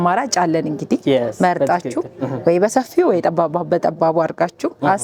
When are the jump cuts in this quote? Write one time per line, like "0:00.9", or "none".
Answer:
none

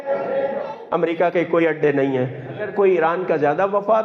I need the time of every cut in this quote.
0:02.7

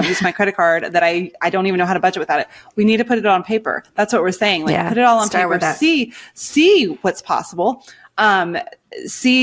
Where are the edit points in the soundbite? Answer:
none

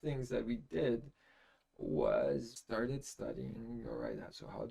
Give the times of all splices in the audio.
0:02.6

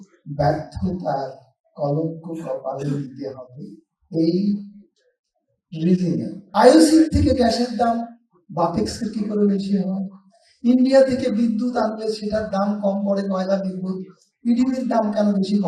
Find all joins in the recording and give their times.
0:06.4

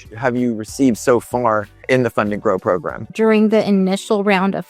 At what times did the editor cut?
0:01.9
0:03.0

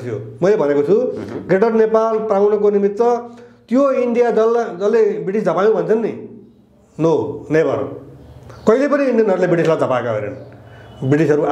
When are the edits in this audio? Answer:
none

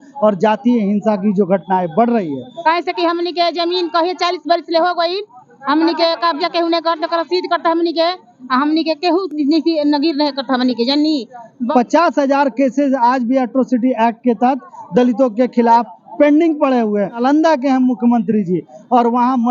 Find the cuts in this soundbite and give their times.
0:02.5
0:11.6
0:17.2

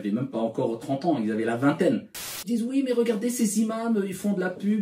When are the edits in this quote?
0:02.5

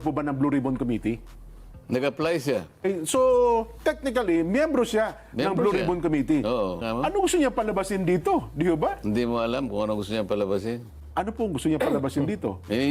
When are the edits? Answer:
0:02.8
0:06.8
0:10.9

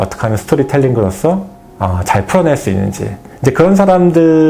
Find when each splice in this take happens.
none

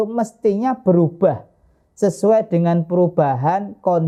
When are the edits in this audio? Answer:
none

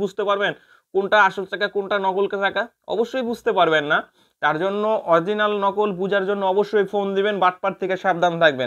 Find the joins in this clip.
none

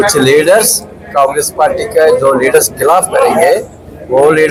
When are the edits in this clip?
none

